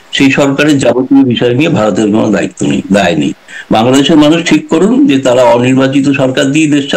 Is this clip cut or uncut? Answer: uncut